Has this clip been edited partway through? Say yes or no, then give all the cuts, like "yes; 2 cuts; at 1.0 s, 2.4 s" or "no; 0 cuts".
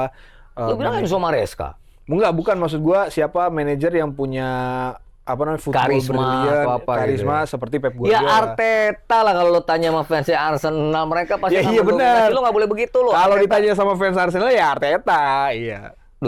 no; 0 cuts